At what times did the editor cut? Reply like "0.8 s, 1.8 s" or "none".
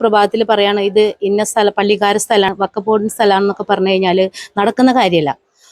2.5 s